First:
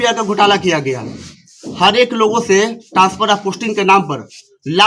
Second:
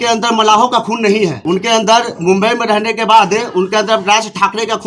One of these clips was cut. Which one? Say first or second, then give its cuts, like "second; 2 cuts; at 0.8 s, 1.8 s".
second; 1 cut; at 1.4 s